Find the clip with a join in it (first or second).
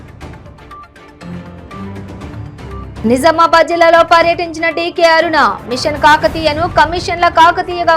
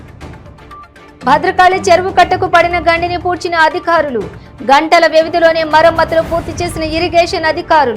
second